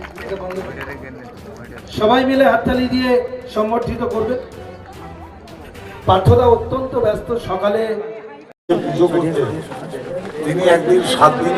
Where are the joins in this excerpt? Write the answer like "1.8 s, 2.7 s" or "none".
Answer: 8.6 s